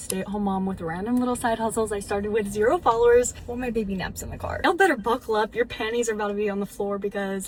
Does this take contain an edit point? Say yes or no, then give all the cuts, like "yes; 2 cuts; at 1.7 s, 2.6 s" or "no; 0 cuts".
no; 0 cuts